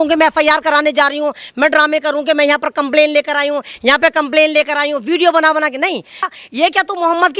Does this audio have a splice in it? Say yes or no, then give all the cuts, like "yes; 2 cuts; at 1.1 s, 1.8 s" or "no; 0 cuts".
yes; 1 cut; at 6.3 s